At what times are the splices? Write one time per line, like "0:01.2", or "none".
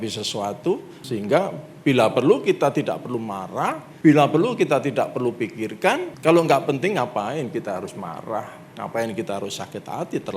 0:00.9
0:03.9
0:06.1